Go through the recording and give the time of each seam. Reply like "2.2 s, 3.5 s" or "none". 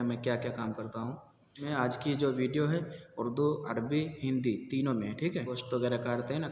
1.6 s, 5.6 s